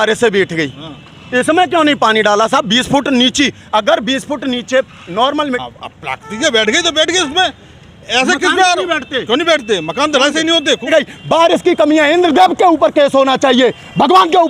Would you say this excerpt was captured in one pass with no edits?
no; 2 cuts; at 5.6 s, 10.9 s

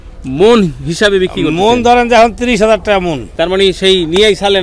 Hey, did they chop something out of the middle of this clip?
yes; 1 cut; at 3.2 s

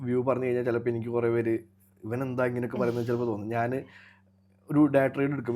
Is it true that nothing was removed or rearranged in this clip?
yes; 0 cuts

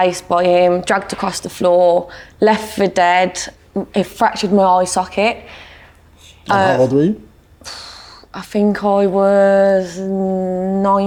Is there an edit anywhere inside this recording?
no; 0 cuts

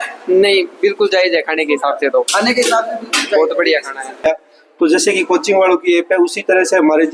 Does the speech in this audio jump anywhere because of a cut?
yes; 1 cut; at 4.2 s

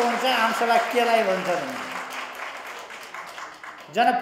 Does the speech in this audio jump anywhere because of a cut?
no; 0 cuts

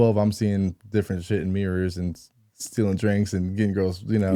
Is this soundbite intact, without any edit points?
yes; 0 cuts

